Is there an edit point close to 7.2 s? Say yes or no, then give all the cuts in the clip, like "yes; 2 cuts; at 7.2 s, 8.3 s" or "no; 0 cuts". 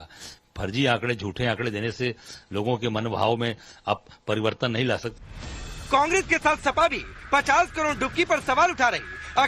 no; 1 cut; at 4.1 s